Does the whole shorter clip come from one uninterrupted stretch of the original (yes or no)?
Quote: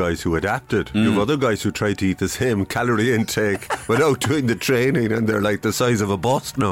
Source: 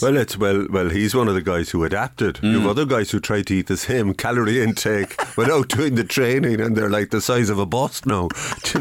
yes